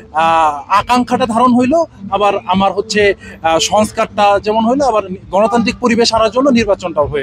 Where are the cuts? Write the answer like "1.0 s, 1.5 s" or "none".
none